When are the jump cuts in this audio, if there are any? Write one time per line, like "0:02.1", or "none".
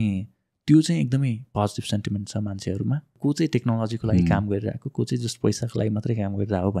0:03.1

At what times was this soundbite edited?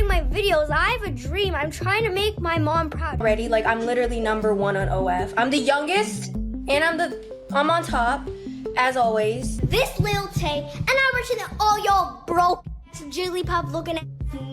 0:03.2
0:09.5

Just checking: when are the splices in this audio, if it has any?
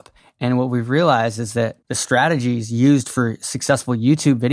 0:01.8

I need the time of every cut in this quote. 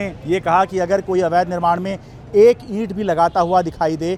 none

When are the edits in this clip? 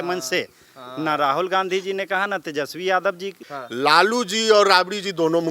0:03.4

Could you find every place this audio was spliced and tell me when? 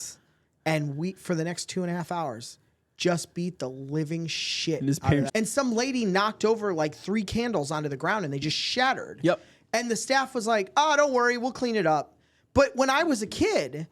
0:05.3

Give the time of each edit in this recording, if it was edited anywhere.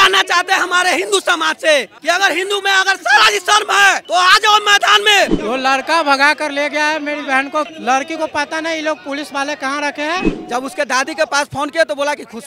0:05.4
0:07.7
0:10.3

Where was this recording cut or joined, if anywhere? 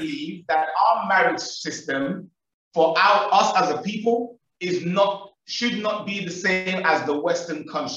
none

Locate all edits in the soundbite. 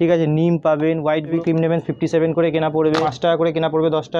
0:01.4
0:03.1

